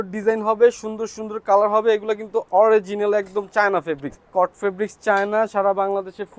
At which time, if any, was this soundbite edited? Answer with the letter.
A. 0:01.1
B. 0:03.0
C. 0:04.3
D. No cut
C